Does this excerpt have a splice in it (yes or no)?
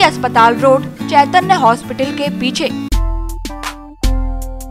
yes